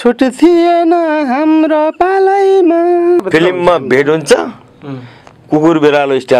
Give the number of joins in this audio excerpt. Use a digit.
1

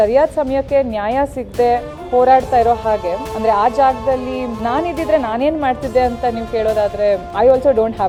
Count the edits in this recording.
0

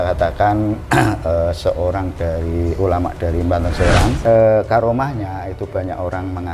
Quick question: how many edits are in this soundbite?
1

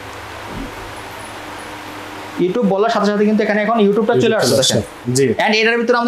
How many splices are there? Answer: 1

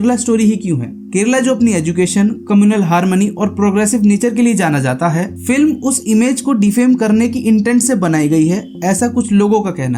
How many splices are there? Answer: 0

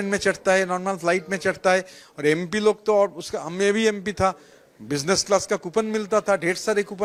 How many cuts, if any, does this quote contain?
0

